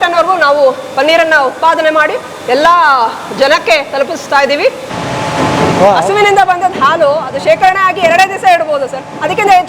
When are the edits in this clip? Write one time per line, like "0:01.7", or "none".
0:04.9